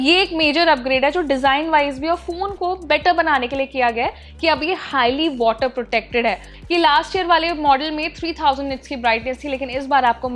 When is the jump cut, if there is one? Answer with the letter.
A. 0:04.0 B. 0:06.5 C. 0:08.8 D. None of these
B